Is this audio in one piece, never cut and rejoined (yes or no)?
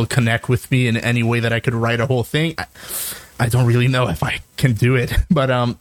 yes